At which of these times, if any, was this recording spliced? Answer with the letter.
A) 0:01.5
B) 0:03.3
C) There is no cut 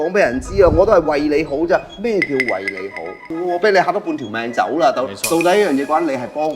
B